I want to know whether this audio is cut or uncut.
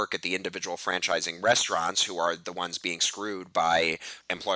uncut